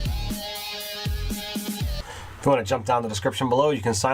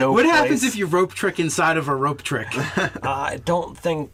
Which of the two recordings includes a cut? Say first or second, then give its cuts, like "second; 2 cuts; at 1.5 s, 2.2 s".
first; 1 cut; at 1.9 s